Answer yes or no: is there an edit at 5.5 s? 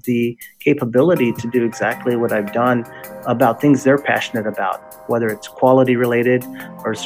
no